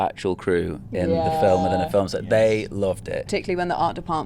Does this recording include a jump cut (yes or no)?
yes